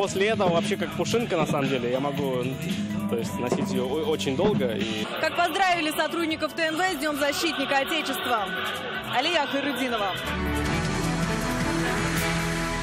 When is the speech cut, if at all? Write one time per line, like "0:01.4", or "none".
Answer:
none